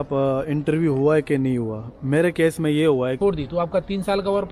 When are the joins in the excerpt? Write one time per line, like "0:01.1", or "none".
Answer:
0:03.2